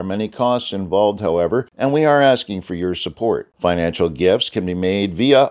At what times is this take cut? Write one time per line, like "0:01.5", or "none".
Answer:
0:01.7